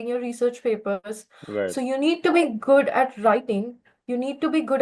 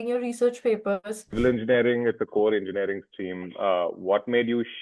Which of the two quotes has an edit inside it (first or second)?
second